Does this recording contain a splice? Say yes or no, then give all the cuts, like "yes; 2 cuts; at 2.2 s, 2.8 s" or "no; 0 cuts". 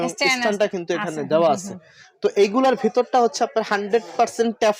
no; 0 cuts